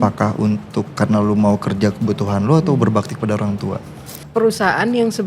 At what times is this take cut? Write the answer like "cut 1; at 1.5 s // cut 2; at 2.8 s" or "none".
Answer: cut 1; at 4.2 s